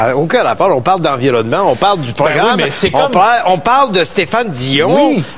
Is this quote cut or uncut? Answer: cut